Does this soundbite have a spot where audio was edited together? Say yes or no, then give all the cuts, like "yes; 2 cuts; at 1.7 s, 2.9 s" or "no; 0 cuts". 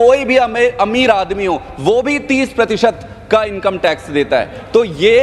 no; 0 cuts